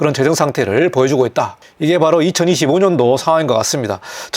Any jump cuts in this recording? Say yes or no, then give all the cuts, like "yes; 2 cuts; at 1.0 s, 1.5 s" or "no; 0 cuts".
no; 0 cuts